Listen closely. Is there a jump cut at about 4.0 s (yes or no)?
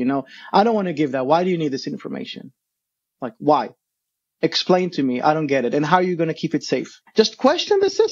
no